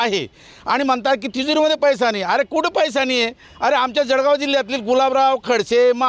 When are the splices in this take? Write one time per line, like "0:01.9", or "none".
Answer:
none